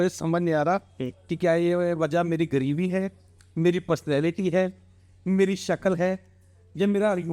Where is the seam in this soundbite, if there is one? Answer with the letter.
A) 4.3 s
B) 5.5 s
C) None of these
C